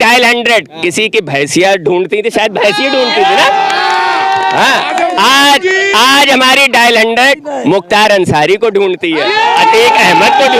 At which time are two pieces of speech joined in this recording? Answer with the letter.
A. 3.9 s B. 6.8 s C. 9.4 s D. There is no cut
D